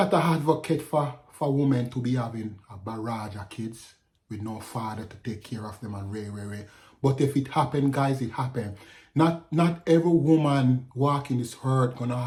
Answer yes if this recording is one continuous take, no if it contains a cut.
yes